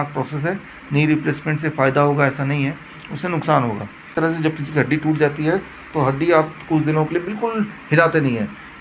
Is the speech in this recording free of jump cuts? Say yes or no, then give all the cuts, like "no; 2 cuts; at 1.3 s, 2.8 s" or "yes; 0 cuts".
no; 1 cut; at 4.1 s